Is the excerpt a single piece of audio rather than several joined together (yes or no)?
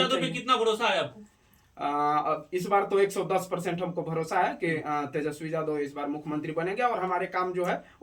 yes